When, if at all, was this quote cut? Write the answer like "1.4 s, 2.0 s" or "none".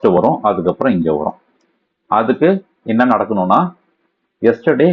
none